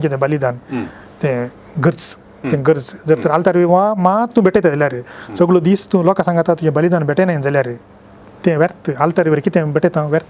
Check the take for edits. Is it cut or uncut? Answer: uncut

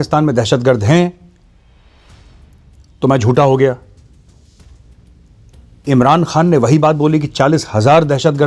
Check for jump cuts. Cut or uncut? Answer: uncut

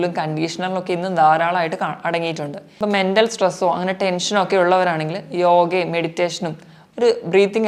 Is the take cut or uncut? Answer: cut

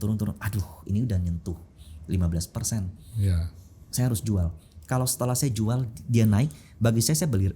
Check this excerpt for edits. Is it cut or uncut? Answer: uncut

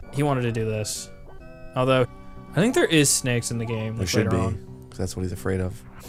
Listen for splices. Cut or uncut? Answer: uncut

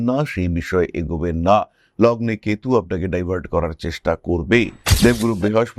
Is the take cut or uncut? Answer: cut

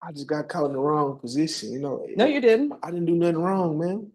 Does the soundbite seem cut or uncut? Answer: uncut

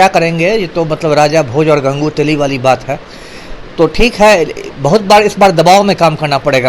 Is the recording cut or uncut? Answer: uncut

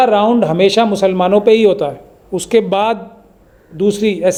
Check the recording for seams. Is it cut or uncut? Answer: uncut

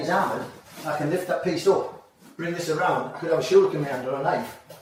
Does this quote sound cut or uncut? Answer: uncut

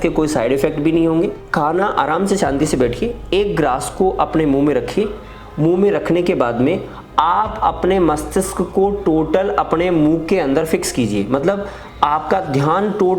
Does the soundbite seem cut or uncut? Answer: uncut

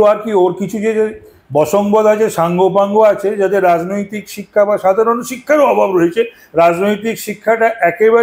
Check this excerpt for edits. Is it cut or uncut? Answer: uncut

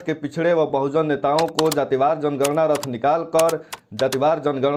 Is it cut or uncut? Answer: uncut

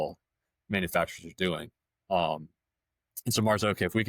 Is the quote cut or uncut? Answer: uncut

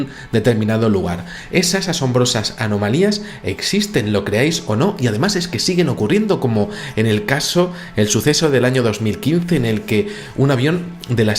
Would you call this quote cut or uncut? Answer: cut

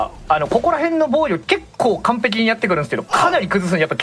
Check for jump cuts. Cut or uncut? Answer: uncut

